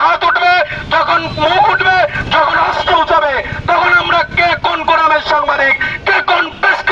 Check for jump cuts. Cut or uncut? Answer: uncut